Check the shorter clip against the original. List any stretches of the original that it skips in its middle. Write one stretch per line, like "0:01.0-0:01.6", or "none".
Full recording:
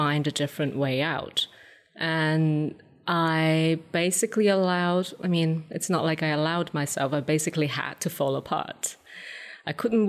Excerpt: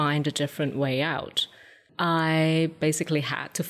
0:01.8-0:02.9
0:03.9-0:07.2